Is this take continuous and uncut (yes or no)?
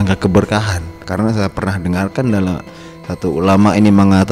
yes